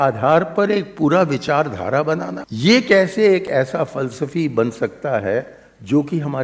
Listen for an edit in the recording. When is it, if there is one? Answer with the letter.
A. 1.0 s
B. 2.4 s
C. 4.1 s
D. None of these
B